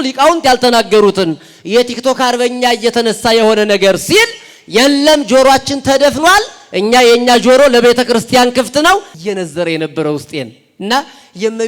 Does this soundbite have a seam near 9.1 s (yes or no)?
yes